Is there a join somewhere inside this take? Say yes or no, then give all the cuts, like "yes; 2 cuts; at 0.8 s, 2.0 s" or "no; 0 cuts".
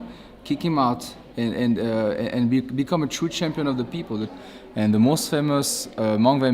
yes; 1 cut; at 4.3 s